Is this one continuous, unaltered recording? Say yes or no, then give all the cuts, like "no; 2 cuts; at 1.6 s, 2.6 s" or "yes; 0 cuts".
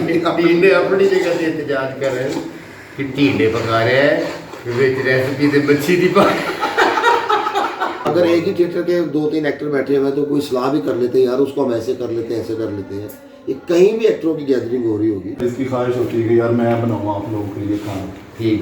no; 2 cuts; at 8.1 s, 15.4 s